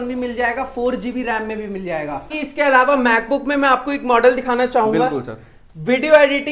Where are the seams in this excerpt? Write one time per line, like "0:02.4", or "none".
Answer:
0:02.3